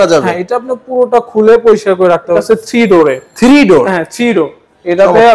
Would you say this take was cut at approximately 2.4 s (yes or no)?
yes